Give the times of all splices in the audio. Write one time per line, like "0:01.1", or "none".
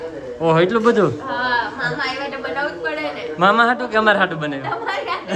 none